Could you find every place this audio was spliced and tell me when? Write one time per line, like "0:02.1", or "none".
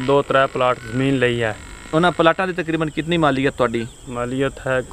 none